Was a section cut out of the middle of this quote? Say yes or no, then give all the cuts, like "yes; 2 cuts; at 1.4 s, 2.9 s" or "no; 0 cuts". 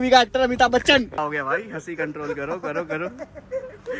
yes; 1 cut; at 1.2 s